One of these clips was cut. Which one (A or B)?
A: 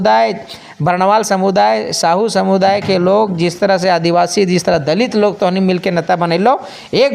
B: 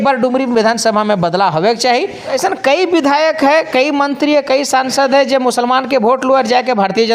B